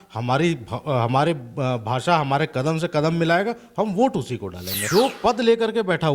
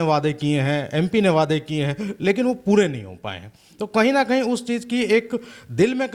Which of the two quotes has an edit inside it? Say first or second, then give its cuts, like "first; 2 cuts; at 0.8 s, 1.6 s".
first; 1 cut; at 4.8 s